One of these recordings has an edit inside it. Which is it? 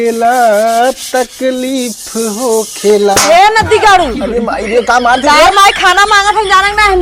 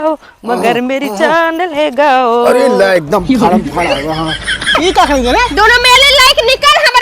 second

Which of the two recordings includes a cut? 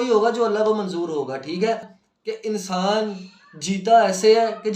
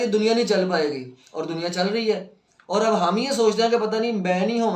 first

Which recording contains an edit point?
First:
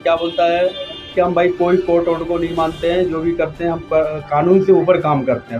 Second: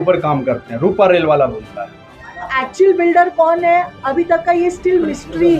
second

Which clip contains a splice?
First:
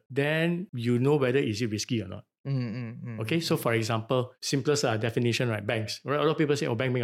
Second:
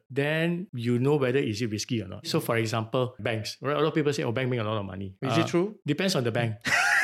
second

